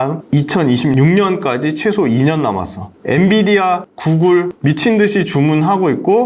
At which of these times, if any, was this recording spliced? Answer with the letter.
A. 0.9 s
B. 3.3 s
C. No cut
A